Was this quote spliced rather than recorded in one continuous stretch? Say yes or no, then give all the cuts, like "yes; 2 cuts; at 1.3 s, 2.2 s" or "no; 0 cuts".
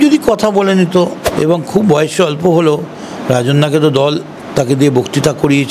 yes; 1 cut; at 1.3 s